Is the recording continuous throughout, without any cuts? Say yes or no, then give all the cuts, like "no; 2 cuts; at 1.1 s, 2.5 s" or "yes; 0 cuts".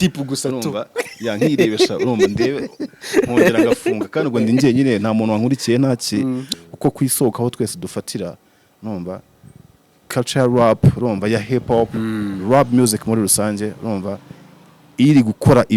no; 1 cut; at 6.5 s